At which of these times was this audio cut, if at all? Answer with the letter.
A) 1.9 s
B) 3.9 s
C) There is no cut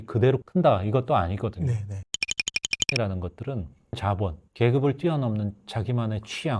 C